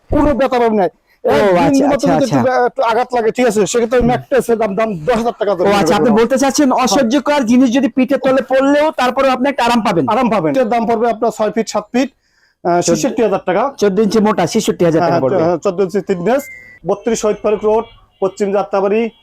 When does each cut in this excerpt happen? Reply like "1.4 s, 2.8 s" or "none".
10.5 s, 16.7 s